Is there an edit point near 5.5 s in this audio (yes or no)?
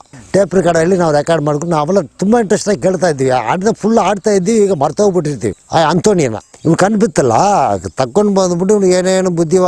yes